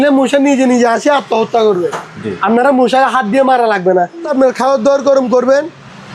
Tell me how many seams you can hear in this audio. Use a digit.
1